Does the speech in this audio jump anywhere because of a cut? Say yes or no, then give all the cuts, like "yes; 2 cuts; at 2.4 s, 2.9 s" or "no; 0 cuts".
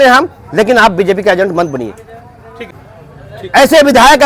yes; 1 cut; at 2.7 s